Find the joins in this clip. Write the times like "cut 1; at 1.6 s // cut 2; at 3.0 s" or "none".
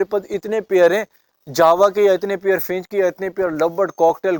none